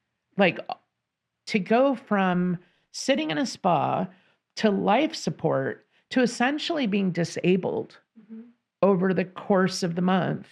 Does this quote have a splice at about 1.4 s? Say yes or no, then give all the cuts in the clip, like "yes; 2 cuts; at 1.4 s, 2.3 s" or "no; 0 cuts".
yes; 1 cut; at 1.4 s